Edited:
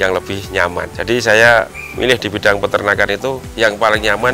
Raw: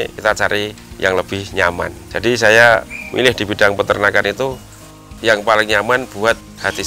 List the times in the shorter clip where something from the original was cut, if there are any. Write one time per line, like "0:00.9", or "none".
0:00.9
0:03.5